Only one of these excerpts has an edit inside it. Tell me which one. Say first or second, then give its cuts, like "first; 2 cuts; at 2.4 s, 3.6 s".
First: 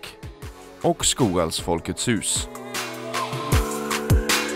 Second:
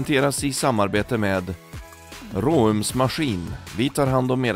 first; 1 cut; at 2.4 s